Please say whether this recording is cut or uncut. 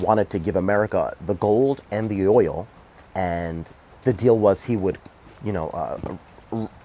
uncut